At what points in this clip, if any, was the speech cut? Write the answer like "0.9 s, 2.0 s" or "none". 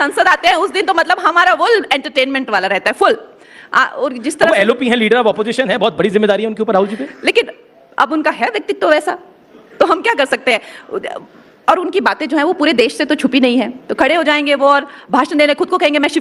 none